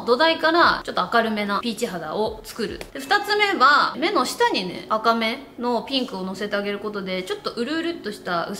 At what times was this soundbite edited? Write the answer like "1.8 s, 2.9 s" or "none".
0.8 s, 2.8 s, 3.9 s